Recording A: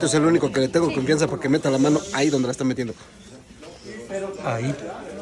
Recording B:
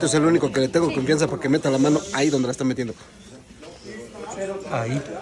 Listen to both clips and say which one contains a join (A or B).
A